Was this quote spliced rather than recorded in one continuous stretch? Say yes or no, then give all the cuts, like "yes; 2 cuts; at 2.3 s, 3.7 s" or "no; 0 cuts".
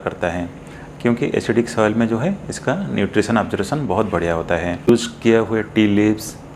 yes; 1 cut; at 4.9 s